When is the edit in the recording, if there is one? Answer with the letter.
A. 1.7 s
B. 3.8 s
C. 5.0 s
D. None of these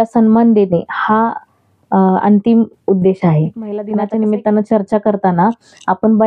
B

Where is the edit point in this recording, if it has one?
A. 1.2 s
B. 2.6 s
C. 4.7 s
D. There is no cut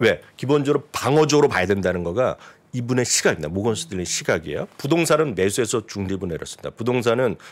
C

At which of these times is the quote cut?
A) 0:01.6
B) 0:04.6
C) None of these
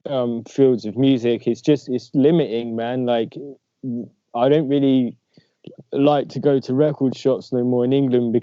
C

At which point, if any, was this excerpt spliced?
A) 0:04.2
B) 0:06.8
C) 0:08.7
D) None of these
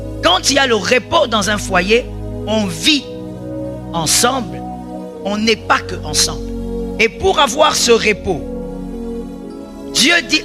B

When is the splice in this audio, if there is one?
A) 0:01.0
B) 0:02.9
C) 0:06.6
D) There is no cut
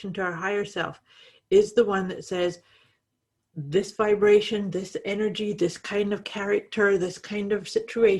D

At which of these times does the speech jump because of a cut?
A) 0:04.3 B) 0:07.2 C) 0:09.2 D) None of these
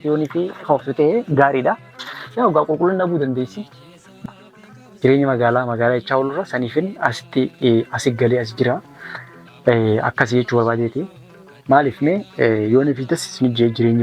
A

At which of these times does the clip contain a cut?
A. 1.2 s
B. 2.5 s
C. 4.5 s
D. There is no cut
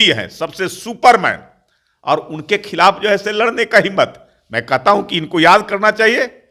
D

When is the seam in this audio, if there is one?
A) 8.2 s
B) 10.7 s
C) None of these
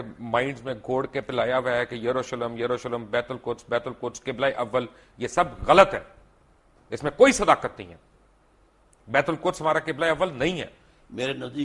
C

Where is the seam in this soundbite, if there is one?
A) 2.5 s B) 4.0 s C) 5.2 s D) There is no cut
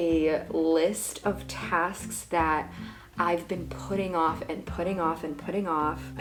D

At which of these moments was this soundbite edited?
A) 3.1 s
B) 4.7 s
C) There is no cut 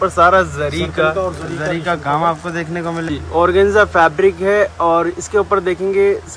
A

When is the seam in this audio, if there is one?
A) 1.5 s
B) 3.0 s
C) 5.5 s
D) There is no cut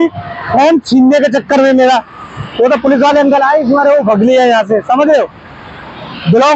D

